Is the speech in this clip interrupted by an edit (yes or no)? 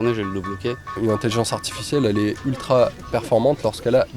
yes